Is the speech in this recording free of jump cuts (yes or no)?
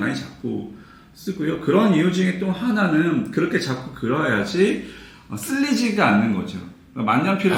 yes